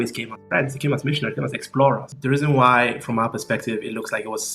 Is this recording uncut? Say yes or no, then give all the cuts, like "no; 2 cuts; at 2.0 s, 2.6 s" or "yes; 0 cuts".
no; 1 cut; at 2.1 s